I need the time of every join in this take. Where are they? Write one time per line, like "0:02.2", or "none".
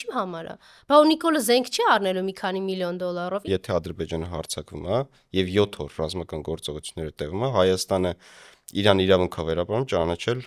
0:03.5